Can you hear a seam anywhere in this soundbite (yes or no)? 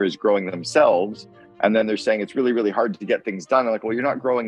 no